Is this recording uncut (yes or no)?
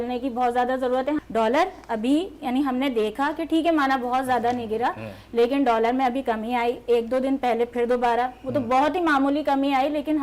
no